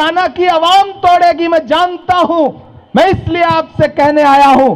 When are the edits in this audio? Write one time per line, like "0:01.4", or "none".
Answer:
none